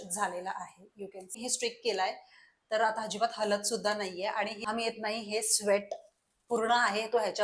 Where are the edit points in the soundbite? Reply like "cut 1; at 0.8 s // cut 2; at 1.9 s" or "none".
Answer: cut 1; at 1.4 s // cut 2; at 4.6 s